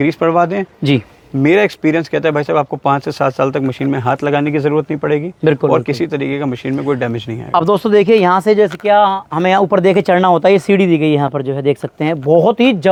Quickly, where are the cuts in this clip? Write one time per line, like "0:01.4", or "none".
none